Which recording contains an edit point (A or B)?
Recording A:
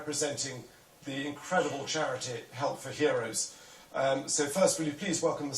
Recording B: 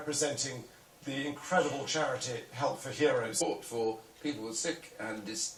A